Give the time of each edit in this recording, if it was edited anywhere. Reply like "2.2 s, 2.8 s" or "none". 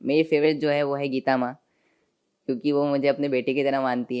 none